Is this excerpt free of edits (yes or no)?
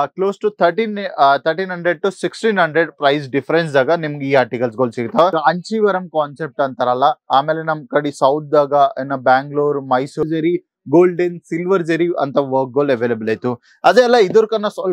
no